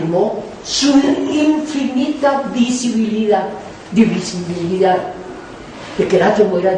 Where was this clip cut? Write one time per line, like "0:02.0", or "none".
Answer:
0:02.6